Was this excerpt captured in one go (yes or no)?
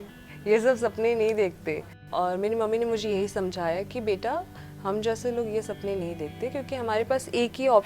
no